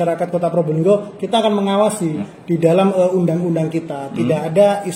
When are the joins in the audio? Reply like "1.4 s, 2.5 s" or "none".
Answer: 2.3 s